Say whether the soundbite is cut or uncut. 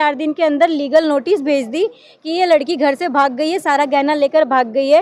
uncut